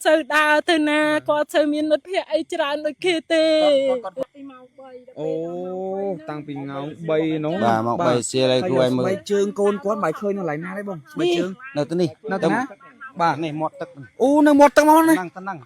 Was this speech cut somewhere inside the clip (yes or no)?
yes